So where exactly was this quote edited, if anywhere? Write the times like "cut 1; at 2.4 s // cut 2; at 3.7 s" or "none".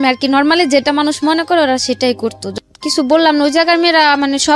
cut 1; at 2.4 s